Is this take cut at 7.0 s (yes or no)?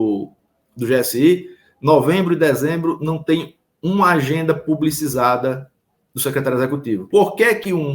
yes